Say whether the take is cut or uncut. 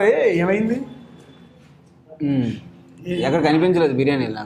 uncut